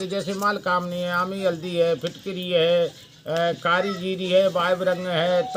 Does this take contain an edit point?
no; 0 cuts

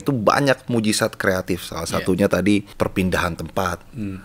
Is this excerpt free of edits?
no; 1 cut; at 2.7 s

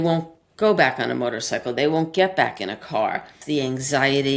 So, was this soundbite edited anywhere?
yes; 1 cut; at 3.4 s

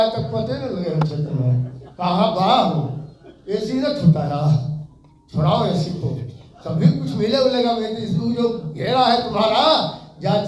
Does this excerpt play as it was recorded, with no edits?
yes; 0 cuts

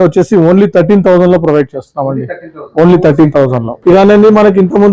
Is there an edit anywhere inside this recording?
yes; 1 cut; at 3.7 s

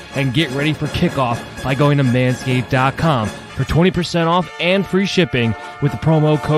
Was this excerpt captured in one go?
yes; 0 cuts

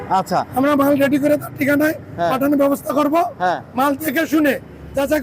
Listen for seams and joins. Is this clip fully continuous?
yes; 0 cuts

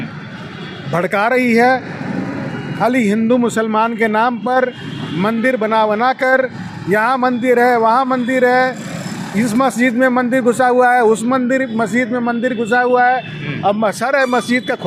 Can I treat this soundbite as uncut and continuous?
yes; 0 cuts

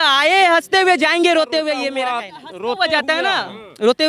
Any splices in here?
yes; 1 cut; at 2.0 s

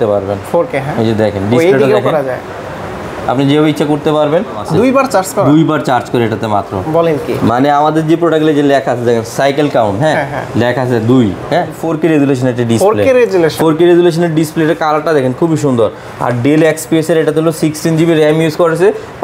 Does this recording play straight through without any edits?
no; 2 cuts; at 4.6 s, 11.8 s

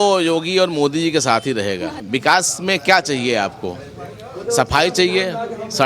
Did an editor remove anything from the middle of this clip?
yes; 1 cut; at 2.0 s

